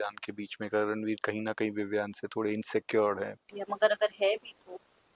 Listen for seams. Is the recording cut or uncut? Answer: cut